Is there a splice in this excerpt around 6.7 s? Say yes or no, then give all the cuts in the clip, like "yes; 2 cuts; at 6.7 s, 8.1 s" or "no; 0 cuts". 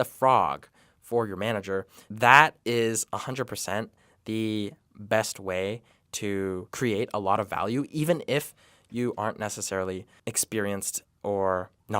yes; 2 cuts; at 2.0 s, 6.7 s